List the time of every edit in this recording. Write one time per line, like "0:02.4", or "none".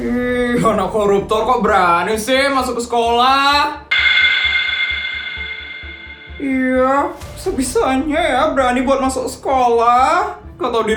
none